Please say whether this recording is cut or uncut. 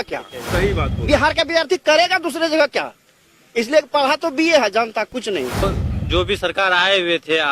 cut